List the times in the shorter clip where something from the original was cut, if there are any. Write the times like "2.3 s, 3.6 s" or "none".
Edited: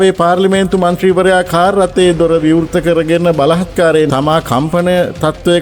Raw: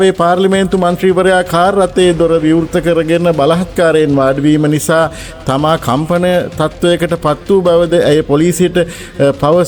4.1 s